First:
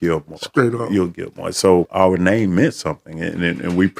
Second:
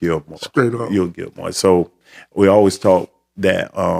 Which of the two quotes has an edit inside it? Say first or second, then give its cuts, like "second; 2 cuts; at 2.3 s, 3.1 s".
first; 1 cut; at 1.9 s